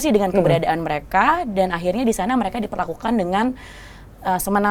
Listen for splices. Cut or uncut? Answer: uncut